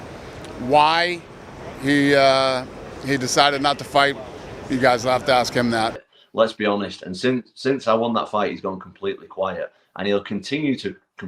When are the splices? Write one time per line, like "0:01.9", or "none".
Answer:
0:06.1